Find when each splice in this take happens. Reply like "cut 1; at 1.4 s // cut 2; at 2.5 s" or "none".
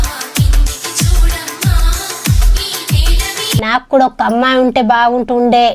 cut 1; at 3.2 s